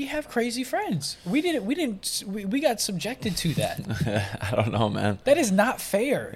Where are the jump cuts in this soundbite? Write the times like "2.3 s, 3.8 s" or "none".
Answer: none

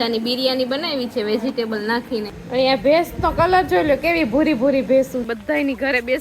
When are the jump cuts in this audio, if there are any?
2.3 s, 5.3 s

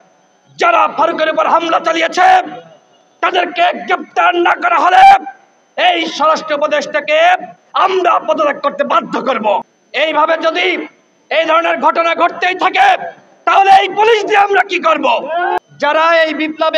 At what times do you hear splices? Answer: 9.7 s, 15.6 s

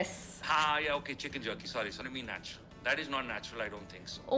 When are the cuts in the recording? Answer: 2.0 s

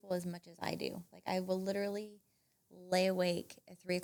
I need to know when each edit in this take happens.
none

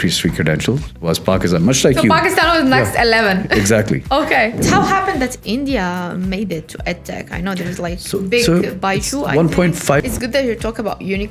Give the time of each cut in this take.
4.6 s, 10.0 s

